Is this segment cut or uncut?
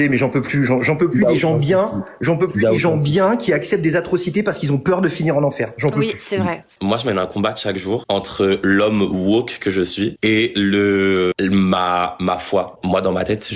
cut